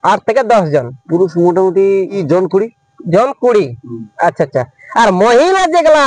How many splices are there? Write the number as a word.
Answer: two